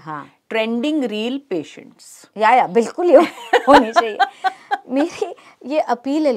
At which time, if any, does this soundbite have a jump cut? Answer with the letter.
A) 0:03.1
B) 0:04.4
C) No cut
C